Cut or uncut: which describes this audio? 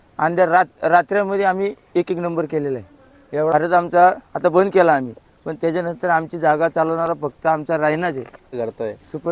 cut